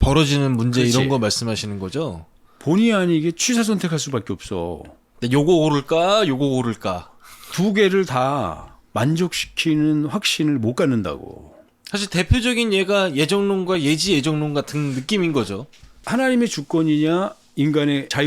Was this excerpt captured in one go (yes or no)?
no